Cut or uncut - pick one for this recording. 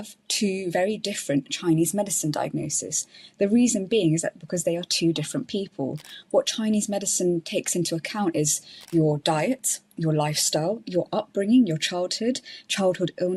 uncut